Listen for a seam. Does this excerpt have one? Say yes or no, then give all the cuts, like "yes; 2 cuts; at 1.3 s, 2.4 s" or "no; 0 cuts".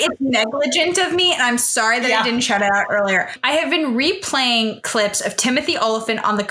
yes; 1 cut; at 3.4 s